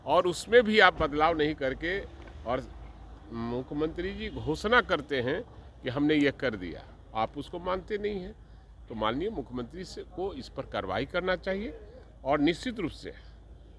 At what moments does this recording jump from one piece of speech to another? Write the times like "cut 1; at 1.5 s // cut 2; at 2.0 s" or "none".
none